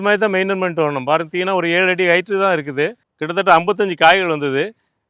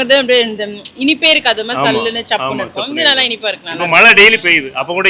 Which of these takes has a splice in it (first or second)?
first